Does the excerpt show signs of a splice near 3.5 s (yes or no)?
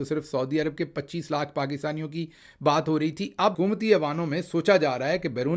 yes